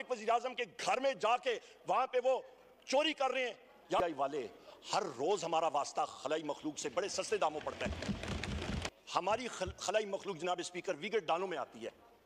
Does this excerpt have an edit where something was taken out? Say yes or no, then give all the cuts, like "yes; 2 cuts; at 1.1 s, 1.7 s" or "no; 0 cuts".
yes; 2 cuts; at 4.0 s, 8.8 s